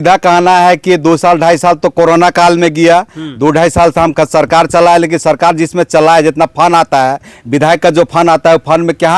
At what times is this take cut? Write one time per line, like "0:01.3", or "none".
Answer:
none